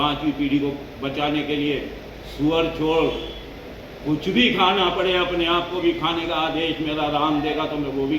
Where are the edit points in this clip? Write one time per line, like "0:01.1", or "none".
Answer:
none